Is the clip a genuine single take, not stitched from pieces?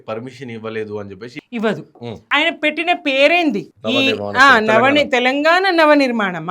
no; 2 cuts; at 1.3 s, 2.1 s

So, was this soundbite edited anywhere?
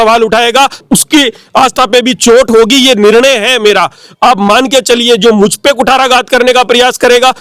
no; 0 cuts

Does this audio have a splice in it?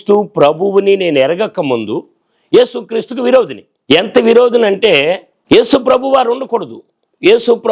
yes; 2 cuts; at 3.7 s, 5.3 s

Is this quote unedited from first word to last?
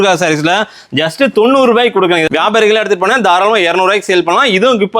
no; 1 cut; at 2.3 s

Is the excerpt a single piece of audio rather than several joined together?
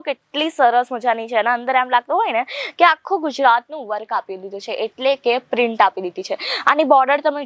yes; 0 cuts

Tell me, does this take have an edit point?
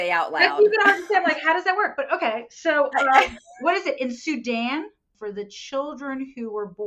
yes; 1 cut; at 5.1 s

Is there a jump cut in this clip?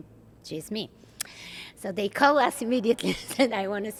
no; 0 cuts

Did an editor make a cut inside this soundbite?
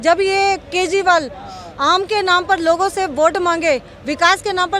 no; 0 cuts

